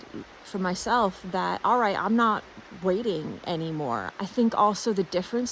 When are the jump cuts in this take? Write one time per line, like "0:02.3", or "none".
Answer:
0:04.0